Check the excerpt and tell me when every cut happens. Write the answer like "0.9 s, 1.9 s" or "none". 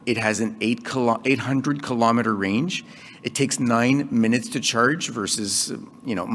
none